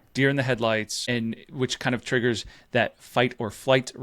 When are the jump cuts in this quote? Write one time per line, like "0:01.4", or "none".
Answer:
0:01.1